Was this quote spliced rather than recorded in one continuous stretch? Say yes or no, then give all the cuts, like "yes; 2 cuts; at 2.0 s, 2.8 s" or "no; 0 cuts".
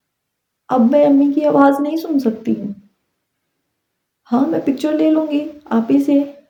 no; 0 cuts